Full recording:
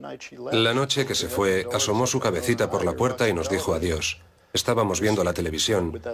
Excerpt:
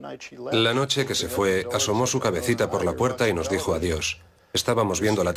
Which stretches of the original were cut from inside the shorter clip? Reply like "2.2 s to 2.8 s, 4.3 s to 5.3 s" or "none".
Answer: none